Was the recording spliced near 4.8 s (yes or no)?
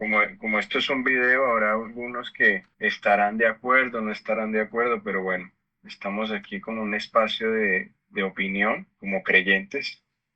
no